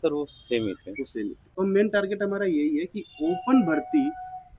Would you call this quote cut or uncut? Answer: cut